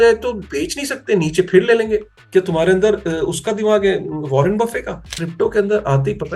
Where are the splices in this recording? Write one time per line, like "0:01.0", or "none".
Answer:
0:02.2
0:05.1